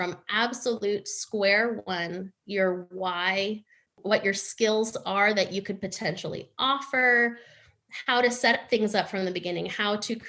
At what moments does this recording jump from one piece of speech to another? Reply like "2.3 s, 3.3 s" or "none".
4.0 s